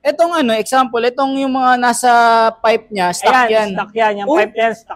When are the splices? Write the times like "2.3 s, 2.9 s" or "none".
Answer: none